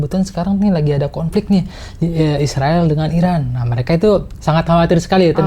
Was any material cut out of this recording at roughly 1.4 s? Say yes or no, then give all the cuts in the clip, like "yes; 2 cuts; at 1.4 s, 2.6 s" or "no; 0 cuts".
no; 0 cuts